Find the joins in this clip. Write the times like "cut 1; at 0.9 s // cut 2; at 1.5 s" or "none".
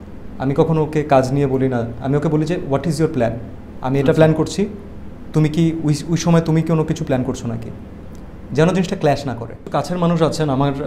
cut 1; at 9.6 s